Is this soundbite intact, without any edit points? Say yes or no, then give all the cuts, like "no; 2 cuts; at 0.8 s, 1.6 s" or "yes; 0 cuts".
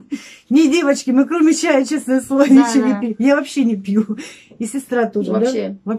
yes; 0 cuts